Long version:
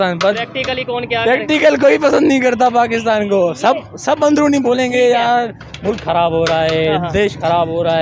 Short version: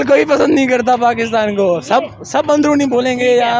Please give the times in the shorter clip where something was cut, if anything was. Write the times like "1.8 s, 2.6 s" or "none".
none